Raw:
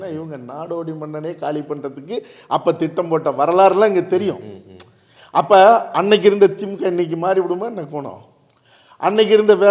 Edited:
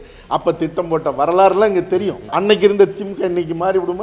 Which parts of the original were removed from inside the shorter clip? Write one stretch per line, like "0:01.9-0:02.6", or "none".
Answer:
0:04.5-0:05.9